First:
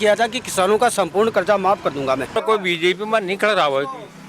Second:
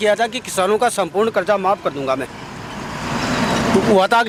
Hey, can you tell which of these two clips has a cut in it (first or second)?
first